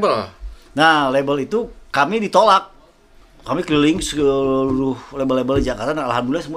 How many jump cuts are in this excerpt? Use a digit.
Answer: 0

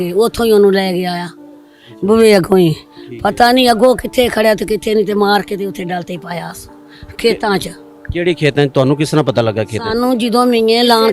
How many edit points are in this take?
0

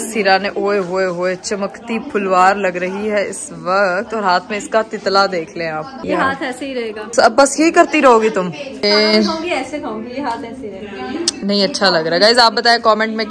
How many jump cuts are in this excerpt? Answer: 0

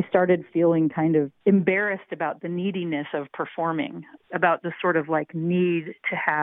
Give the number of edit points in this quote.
1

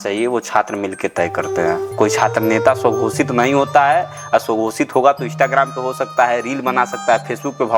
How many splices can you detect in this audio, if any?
0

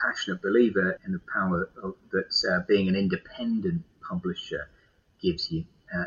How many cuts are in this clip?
1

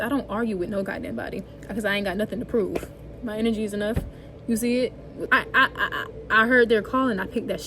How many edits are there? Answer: 1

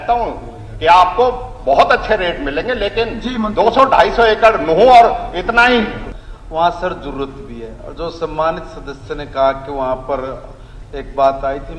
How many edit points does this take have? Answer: 1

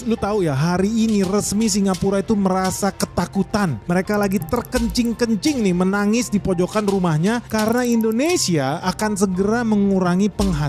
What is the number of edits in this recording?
0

